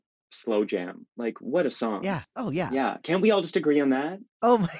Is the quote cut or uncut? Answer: cut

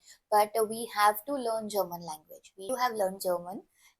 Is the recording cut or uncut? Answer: cut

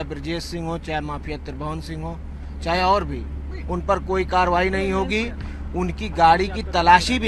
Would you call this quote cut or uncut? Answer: uncut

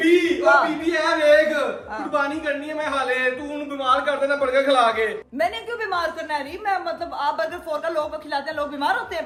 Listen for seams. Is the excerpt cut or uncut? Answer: uncut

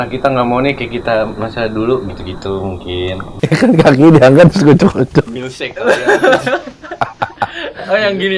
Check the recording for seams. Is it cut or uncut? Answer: cut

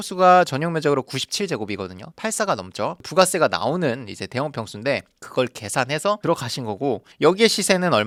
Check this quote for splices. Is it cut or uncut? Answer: uncut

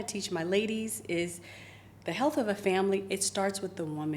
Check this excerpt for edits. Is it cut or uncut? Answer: uncut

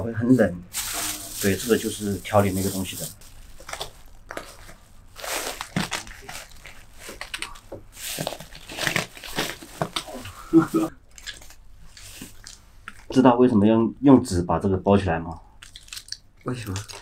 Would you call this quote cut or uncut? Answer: cut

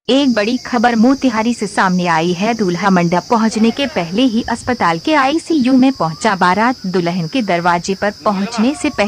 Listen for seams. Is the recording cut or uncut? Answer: uncut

